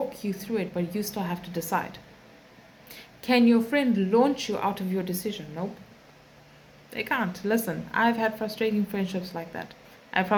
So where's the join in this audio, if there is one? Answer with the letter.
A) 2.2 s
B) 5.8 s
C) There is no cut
C